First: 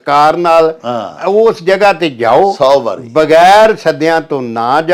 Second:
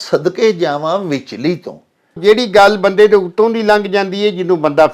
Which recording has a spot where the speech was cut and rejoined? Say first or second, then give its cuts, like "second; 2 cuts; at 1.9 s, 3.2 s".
second; 1 cut; at 2.2 s